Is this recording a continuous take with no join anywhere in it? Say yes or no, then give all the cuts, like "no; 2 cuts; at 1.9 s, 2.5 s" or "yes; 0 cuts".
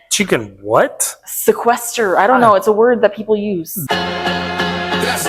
no; 1 cut; at 3.8 s